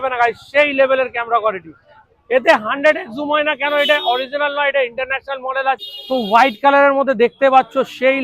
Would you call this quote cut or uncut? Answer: cut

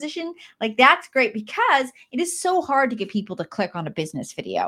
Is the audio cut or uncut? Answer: uncut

